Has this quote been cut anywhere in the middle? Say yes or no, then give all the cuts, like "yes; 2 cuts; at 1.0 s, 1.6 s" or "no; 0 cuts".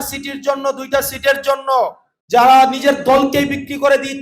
no; 0 cuts